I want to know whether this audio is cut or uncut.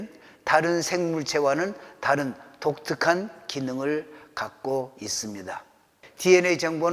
cut